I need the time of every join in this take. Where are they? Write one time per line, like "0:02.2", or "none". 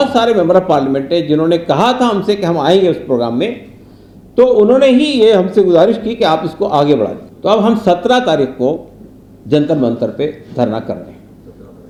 none